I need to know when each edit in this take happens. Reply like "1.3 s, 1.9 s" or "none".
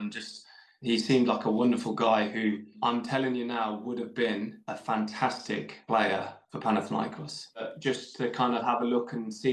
7.6 s